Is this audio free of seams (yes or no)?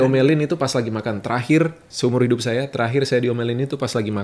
no